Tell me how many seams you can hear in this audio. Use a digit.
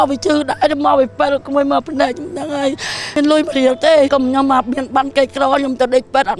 1